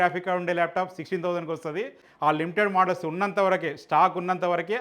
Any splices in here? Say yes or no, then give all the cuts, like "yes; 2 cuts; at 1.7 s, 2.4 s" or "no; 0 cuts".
yes; 1 cut; at 2.0 s